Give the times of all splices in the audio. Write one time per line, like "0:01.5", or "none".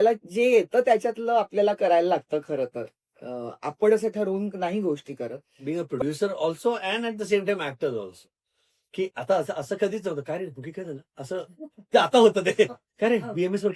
0:05.5

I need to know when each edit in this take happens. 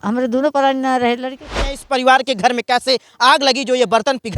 0:01.7

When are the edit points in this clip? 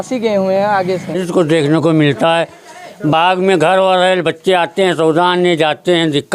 0:01.2

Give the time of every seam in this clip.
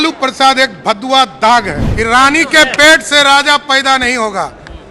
0:01.8

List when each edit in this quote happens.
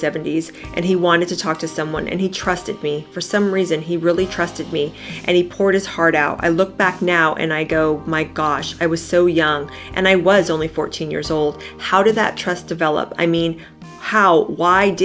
none

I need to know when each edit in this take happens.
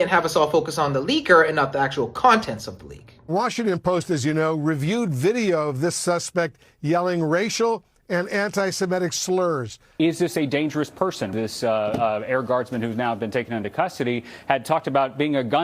0:03.2

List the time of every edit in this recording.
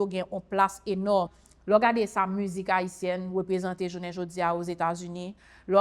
0:01.3

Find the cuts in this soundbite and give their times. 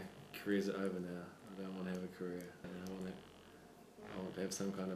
0:02.6

